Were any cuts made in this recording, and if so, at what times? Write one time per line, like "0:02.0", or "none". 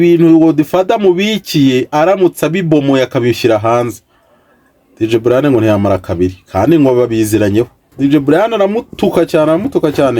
0:07.9

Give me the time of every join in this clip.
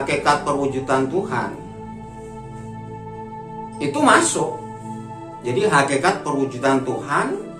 none

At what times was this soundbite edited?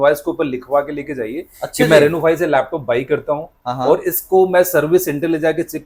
none

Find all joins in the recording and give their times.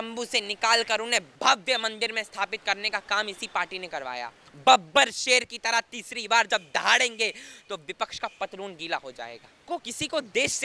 0:01.3
0:04.4
0:09.6

